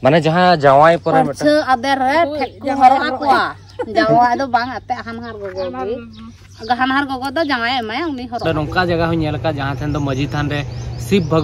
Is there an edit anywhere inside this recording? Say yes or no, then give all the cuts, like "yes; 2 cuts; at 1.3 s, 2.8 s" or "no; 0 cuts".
yes; 1 cut; at 8.4 s